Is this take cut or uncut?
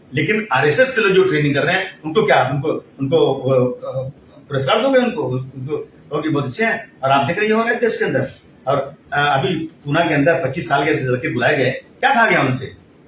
uncut